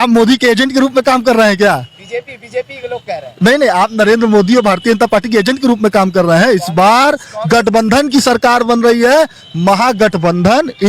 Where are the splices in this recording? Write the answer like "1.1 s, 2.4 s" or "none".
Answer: none

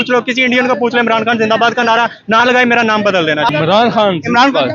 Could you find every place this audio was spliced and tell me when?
3.5 s

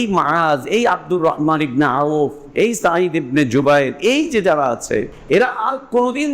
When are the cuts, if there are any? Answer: 5.2 s

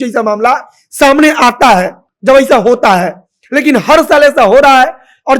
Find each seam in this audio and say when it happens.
none

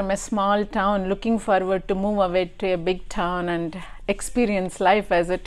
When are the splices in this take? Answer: none

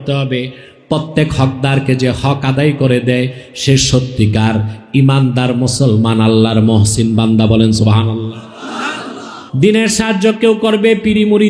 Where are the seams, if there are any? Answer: 9.4 s

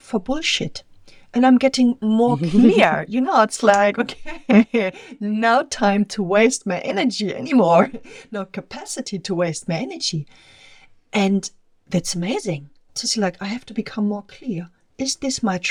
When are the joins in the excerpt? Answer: none

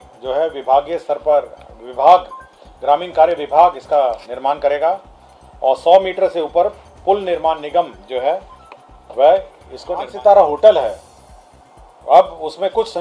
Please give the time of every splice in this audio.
10.1 s

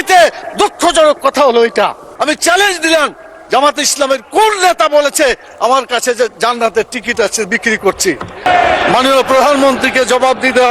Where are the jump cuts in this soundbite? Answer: 2.1 s, 8.5 s

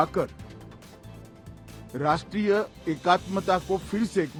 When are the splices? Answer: none

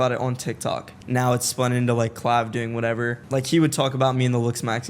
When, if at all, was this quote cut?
0.9 s, 3.2 s

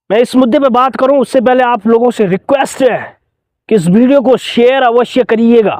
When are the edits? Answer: none

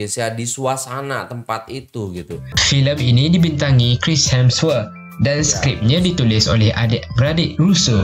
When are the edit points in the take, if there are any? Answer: 2.4 s

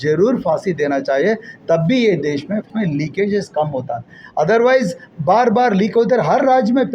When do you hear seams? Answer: 2.7 s

